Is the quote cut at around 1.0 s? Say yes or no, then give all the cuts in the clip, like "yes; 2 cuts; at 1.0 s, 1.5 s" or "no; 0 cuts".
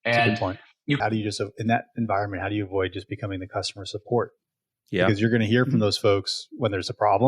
yes; 1 cut; at 1.0 s